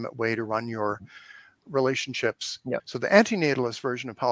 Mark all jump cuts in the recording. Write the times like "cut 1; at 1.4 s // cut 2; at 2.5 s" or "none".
cut 1; at 2.8 s